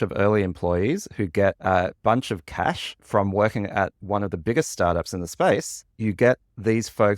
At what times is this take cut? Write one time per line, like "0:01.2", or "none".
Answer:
0:05.8